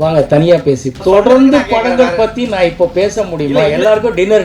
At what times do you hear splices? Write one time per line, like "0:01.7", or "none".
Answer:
0:01.0